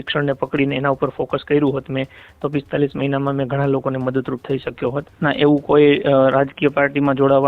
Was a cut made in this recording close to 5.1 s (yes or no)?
yes